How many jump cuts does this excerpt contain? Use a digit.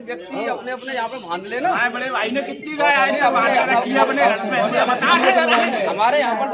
0